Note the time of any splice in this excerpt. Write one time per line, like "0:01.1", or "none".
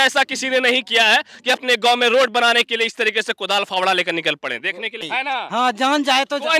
0:05.1